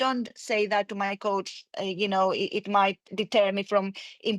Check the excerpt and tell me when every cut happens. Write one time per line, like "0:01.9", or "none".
0:03.1